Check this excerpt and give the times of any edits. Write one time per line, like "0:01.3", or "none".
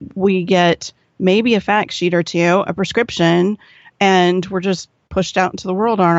none